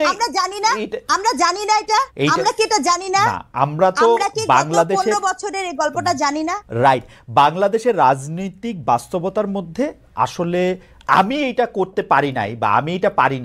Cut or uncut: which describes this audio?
uncut